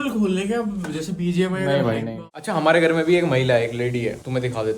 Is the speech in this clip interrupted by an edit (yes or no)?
yes